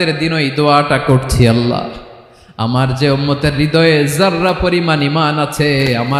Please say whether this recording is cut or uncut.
uncut